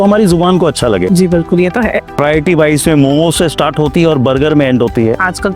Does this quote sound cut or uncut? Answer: cut